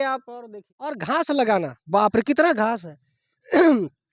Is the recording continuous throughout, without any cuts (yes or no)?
no